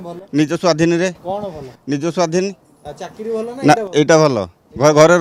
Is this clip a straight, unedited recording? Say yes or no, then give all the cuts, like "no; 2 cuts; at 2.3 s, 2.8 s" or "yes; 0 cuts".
yes; 0 cuts